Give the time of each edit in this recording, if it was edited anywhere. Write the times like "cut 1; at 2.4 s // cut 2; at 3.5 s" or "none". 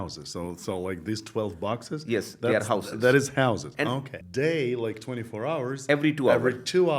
cut 1; at 4.1 s